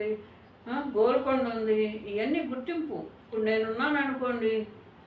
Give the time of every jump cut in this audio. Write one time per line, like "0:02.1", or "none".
0:03.1